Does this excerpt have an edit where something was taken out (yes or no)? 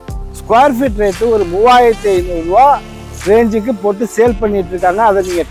no